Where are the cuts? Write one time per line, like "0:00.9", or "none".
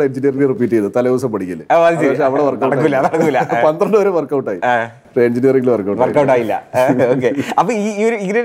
none